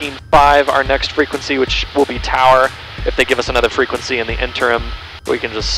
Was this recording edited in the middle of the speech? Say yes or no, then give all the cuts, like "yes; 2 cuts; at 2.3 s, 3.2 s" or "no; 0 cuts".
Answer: no; 0 cuts